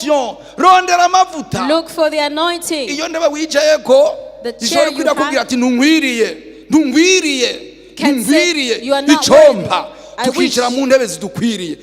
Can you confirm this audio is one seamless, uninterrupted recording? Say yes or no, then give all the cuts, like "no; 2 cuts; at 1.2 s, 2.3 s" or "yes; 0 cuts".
yes; 0 cuts